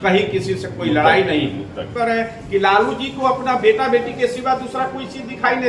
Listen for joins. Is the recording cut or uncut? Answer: cut